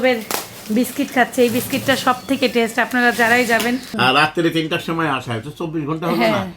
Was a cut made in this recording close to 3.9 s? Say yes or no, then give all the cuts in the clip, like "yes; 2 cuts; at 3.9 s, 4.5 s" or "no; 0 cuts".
yes; 1 cut; at 3.9 s